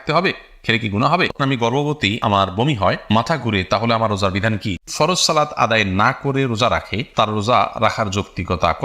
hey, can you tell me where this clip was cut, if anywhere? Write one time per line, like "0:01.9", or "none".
0:01.4
0:04.9